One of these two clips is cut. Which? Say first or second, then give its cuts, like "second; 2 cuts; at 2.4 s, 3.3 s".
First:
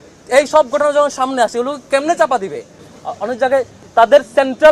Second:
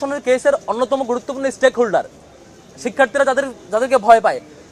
first; 1 cut; at 2.9 s